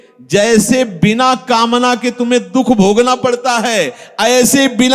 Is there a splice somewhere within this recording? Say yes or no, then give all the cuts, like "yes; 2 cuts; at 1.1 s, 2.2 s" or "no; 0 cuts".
no; 0 cuts